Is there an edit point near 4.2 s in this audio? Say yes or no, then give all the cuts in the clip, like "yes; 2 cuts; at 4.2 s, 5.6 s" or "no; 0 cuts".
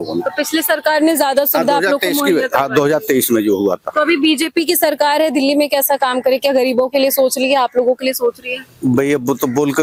no; 0 cuts